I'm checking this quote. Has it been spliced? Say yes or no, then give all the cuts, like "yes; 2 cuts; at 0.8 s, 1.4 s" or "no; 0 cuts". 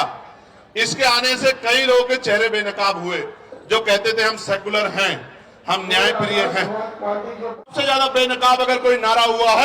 yes; 1 cut; at 7.7 s